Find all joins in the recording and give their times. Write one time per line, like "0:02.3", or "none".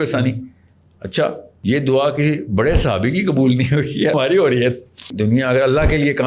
0:01.5
0:04.1
0:05.1